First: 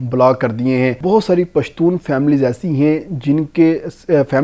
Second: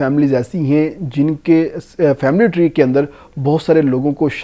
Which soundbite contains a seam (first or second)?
first